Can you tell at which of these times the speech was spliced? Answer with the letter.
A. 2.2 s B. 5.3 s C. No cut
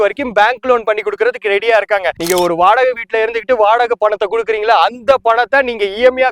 A